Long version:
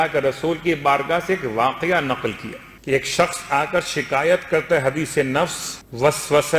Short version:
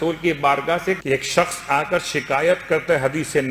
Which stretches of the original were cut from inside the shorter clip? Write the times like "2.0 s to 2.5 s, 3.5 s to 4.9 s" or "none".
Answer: 1.4 s to 2.8 s